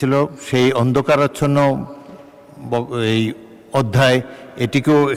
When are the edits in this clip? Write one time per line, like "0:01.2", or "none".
none